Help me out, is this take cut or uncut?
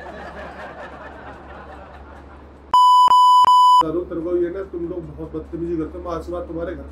uncut